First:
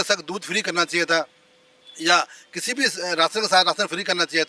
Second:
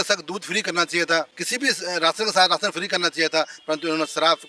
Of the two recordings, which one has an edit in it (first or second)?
second